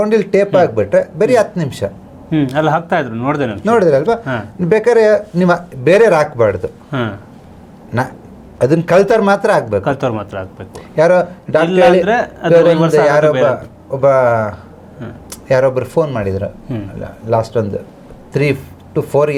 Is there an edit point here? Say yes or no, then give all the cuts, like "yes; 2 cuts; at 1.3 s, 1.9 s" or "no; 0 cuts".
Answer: no; 0 cuts